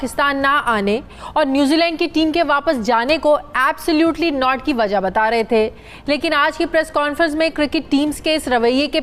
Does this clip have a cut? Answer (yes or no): no